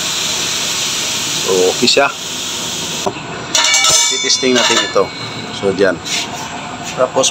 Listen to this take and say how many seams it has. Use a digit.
1